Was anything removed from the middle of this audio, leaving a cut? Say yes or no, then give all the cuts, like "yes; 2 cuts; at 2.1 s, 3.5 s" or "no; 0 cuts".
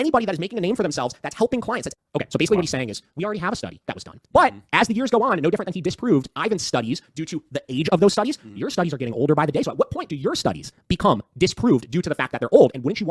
yes; 1 cut; at 1.9 s